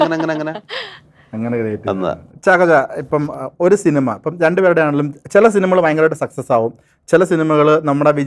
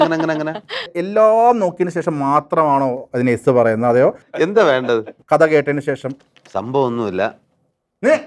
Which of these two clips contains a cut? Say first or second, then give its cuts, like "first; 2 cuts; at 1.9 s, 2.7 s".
second; 3 cuts; at 1.0 s, 4.2 s, 5.1 s